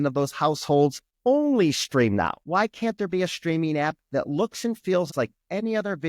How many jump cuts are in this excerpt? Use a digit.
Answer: 3